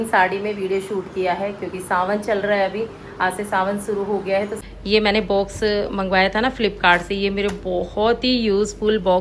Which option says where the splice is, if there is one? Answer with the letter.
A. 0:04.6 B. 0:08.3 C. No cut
A